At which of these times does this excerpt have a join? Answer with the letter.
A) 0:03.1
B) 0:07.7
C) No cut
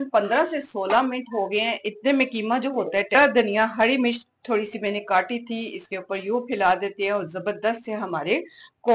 A